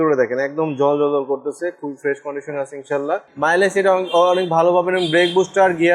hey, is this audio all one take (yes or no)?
no